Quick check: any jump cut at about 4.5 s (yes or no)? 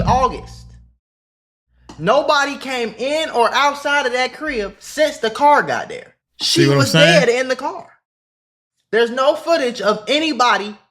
no